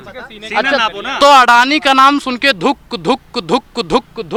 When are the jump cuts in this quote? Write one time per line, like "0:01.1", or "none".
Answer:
none